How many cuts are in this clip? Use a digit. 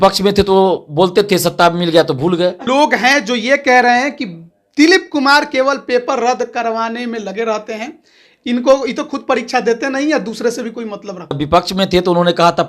2